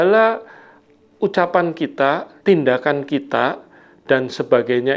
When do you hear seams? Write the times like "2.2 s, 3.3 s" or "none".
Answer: 2.3 s